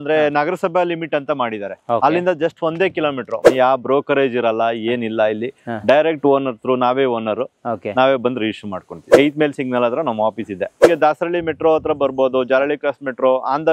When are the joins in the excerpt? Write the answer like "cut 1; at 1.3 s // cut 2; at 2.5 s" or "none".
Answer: cut 1; at 3.4 s // cut 2; at 9.1 s // cut 3; at 10.8 s